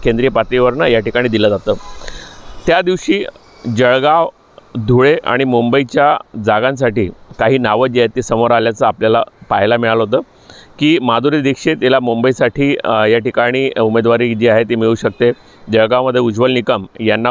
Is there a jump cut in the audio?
no; 0 cuts

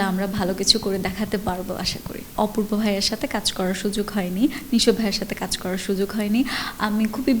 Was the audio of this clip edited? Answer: yes; 1 cut; at 2.3 s

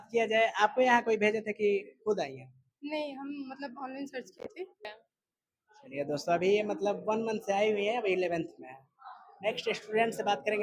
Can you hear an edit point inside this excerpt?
yes; 1 cut; at 5.0 s

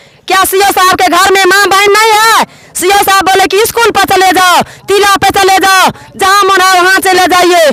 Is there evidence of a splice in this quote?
no; 0 cuts

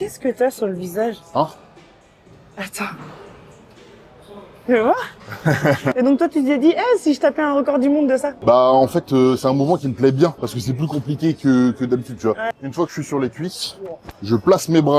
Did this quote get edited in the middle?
yes; 2 cuts; at 5.9 s, 12.4 s

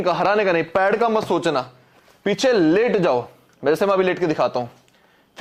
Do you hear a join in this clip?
no; 0 cuts

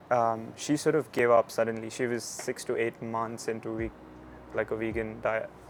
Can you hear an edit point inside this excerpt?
no; 0 cuts

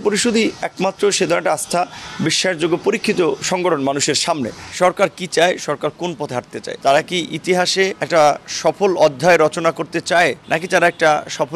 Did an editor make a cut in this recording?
yes; 4 cuts; at 4.6 s, 6.6 s, 8.0 s, 10.4 s

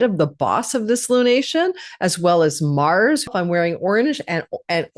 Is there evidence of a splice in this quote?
yes; 1 cut; at 3.3 s

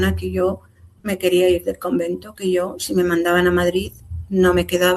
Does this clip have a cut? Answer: no; 0 cuts

